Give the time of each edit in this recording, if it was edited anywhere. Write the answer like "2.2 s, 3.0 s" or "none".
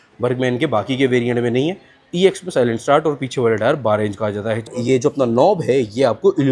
4.7 s

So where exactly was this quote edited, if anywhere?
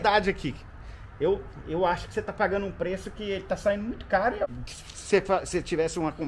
4.5 s

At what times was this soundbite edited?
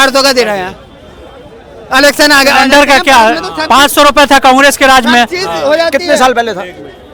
none

